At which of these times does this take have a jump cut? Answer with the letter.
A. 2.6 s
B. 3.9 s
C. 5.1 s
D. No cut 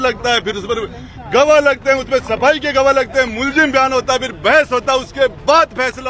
D